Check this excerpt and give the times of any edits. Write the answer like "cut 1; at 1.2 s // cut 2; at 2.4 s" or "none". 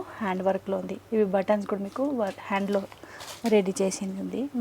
none